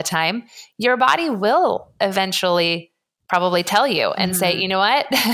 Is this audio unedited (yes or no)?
yes